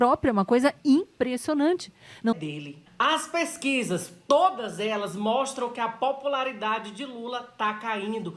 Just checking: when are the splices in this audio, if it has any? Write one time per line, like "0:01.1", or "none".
0:02.3